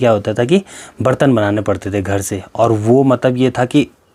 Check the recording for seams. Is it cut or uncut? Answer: uncut